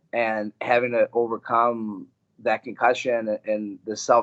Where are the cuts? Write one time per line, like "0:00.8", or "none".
none